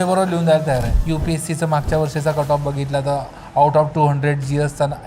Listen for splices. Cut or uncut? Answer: cut